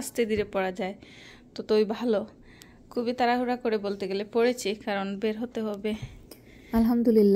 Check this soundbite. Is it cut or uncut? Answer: uncut